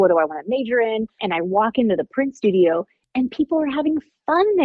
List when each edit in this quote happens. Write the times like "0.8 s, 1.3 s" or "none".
1.2 s